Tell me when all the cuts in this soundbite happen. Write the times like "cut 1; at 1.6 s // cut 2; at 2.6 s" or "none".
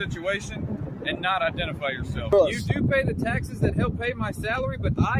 cut 1; at 2.3 s

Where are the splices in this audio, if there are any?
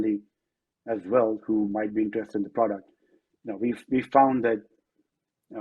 none

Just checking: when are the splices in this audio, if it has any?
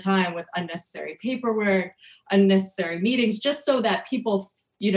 none

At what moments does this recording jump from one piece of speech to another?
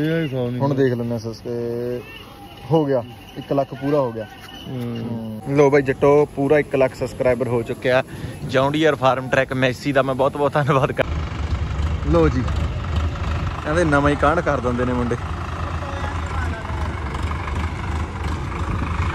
cut 1; at 5.4 s // cut 2; at 11.0 s

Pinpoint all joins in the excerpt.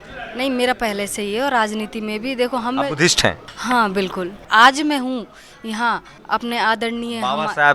cut 1; at 3.5 s // cut 2; at 4.5 s // cut 3; at 6.1 s

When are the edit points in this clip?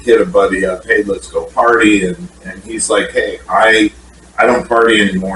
none

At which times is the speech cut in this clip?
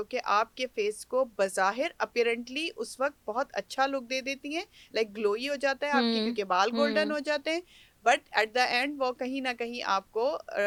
none

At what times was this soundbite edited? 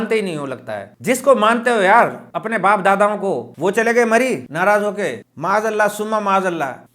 cut 1; at 3.5 s // cut 2; at 5.2 s

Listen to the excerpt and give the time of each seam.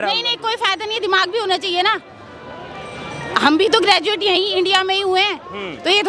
none

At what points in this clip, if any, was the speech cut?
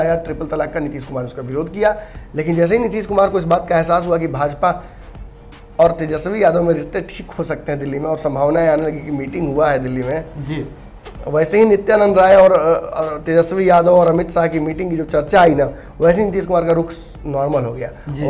none

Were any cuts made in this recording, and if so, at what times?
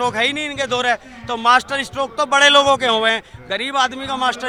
none

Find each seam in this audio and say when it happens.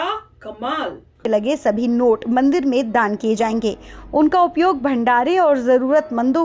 cut 1; at 1.3 s

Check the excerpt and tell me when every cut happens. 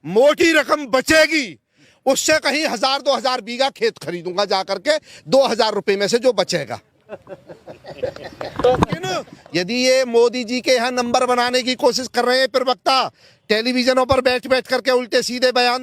cut 1; at 9.3 s

